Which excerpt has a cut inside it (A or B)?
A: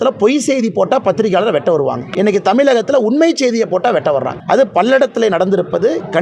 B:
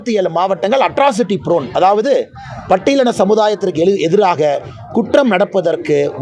A